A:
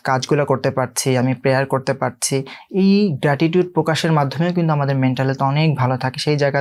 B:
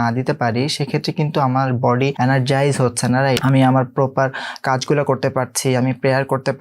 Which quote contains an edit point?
B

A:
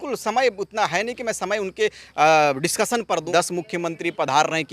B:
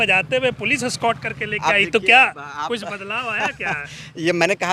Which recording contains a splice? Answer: A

